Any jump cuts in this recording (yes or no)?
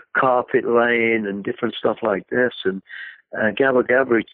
no